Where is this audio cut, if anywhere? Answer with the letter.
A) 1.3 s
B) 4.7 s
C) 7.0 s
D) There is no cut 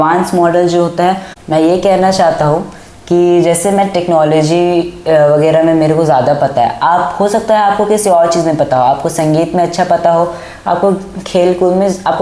A